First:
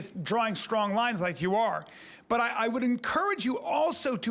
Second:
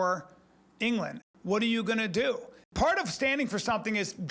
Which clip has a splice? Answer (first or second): second